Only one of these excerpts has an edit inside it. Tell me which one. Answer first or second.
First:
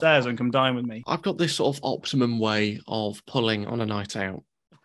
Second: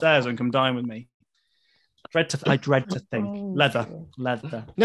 first